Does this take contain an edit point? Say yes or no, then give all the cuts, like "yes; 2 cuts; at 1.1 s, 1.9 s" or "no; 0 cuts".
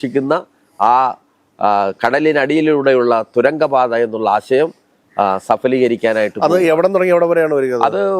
no; 0 cuts